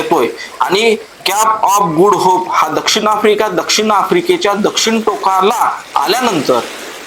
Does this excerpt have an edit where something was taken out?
no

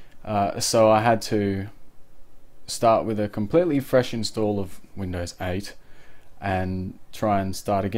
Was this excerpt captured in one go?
yes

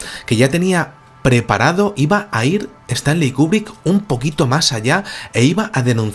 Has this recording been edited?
yes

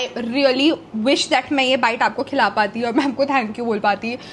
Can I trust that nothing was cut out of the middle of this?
yes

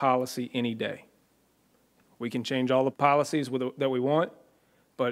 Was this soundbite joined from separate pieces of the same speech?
yes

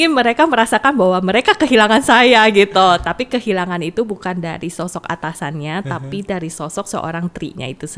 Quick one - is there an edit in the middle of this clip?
no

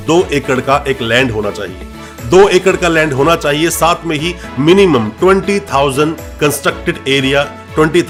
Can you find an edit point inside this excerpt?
no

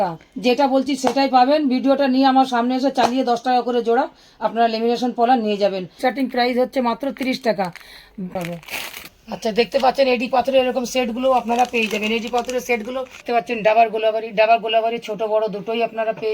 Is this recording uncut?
no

